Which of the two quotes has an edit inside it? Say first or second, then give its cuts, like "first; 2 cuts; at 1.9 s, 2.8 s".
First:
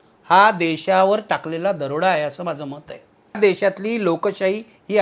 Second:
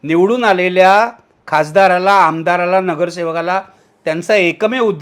first; 1 cut; at 3.4 s